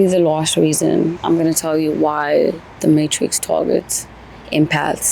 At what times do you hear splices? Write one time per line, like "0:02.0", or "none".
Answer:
0:01.2